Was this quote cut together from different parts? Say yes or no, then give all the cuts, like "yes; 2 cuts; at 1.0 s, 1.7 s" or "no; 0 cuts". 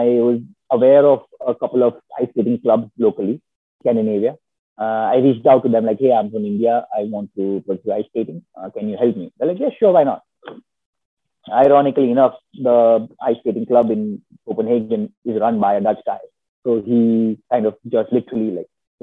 no; 0 cuts